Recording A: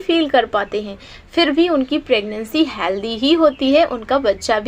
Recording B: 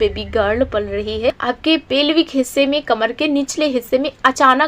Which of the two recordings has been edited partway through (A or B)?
B